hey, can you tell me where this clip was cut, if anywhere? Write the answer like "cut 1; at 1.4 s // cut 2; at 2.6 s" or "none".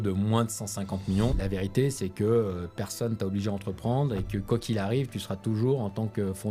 cut 1; at 1.4 s